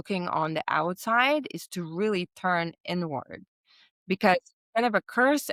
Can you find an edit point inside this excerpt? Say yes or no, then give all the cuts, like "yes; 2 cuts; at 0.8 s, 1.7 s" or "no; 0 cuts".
no; 0 cuts